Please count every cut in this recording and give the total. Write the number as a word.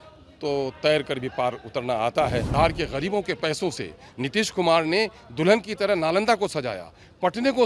one